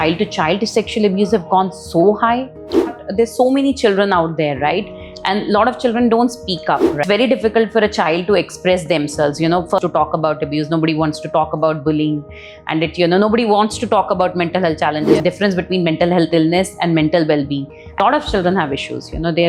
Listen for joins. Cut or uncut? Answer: cut